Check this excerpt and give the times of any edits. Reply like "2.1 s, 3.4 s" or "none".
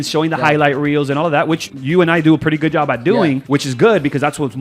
1.7 s, 3.4 s